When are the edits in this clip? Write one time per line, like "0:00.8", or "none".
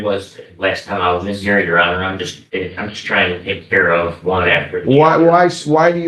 0:02.4